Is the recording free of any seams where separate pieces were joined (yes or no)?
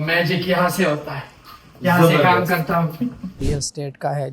no